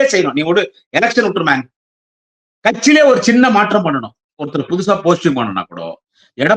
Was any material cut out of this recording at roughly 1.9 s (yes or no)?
no